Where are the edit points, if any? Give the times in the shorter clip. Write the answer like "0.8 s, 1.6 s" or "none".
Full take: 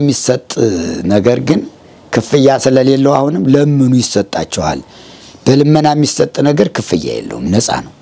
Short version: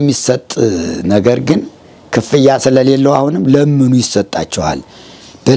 none